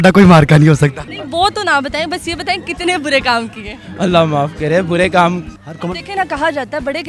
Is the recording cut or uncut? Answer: cut